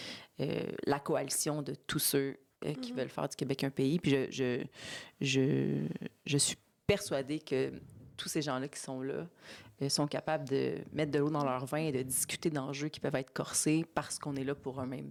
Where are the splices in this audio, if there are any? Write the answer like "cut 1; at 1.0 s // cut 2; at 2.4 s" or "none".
none